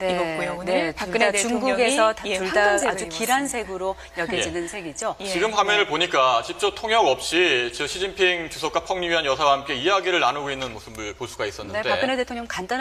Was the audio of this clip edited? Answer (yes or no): yes